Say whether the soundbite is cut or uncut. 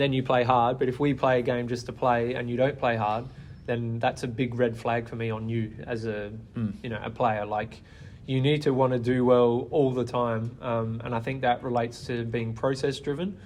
uncut